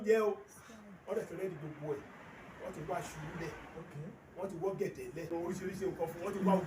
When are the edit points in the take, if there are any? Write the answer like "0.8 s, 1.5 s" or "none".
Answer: 5.3 s